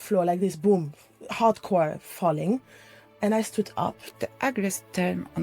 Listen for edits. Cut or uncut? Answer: cut